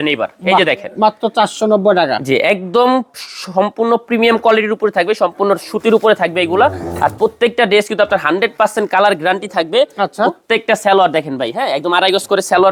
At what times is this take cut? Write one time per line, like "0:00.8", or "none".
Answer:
none